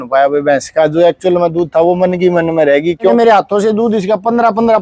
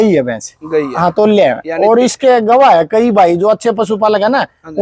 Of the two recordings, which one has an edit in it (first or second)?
first